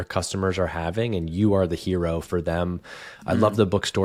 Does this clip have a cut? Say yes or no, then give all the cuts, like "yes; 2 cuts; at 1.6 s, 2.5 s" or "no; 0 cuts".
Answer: no; 0 cuts